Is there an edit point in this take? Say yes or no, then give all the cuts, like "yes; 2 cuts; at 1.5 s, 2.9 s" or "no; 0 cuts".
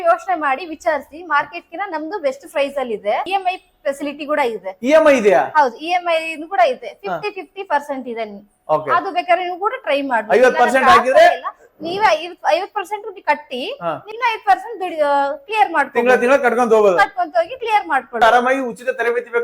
yes; 3 cuts; at 3.3 s, 14.1 s, 18.2 s